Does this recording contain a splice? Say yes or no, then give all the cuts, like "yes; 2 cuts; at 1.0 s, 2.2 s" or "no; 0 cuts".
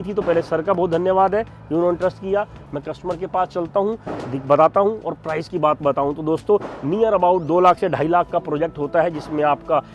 no; 0 cuts